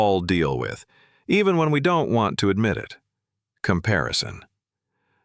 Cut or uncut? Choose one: uncut